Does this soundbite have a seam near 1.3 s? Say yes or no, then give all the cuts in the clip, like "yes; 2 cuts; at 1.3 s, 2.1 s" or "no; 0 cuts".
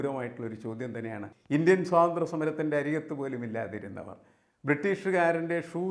yes; 1 cut; at 1.3 s